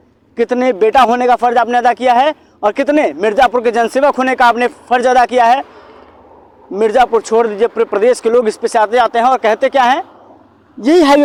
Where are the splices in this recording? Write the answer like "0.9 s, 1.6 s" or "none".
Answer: none